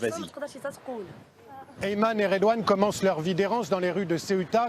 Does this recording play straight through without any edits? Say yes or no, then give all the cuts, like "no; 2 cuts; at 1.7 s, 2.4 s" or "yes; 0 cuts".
yes; 0 cuts